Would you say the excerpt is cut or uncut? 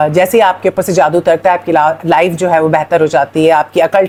uncut